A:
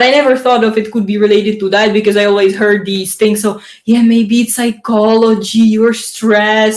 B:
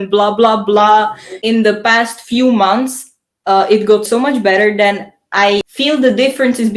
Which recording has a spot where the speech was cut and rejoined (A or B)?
B